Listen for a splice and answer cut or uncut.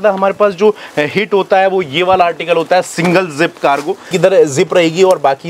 uncut